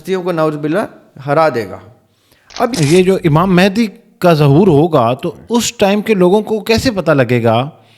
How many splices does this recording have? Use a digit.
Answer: 1